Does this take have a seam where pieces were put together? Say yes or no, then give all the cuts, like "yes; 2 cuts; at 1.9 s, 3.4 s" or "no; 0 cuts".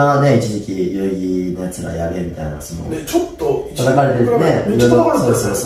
no; 0 cuts